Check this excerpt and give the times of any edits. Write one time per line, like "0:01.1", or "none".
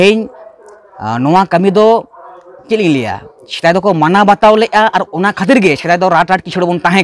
none